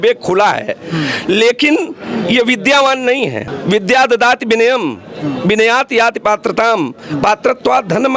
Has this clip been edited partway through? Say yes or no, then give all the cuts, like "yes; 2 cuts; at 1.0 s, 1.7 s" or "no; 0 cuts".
yes; 1 cut; at 3.5 s